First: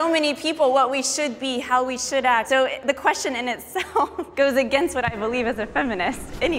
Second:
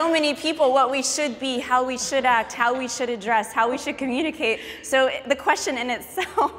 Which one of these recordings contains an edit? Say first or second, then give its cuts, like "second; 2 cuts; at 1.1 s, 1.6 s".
first; 2 cuts; at 2.5 s, 4.2 s